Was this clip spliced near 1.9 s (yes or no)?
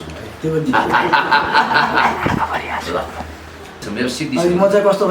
no